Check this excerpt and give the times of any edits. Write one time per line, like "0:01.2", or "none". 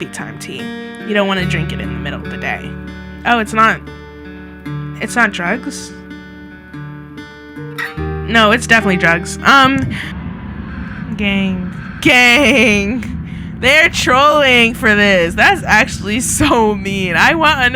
0:10.2